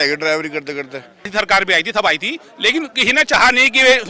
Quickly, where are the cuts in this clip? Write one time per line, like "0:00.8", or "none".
0:01.3